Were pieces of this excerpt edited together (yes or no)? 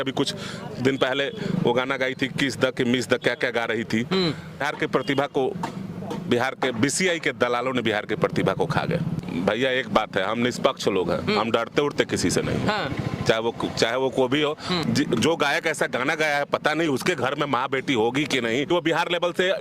yes